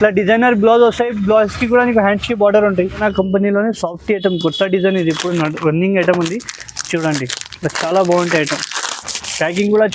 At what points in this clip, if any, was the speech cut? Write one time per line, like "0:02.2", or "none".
0:03.0